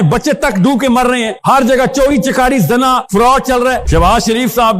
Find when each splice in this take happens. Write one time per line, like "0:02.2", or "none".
0:03.8